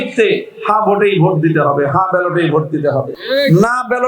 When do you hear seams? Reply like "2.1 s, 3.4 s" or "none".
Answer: 3.2 s